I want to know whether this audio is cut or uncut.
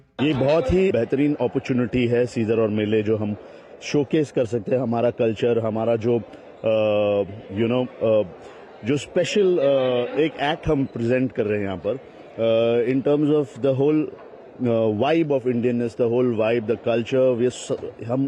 cut